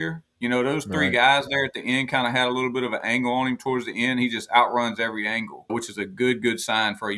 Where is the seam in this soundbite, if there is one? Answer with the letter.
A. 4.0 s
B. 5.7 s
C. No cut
B